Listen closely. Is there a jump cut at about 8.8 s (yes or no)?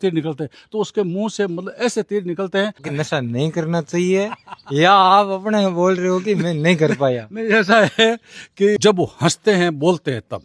yes